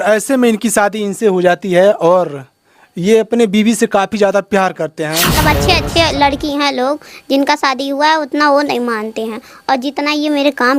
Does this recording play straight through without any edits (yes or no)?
no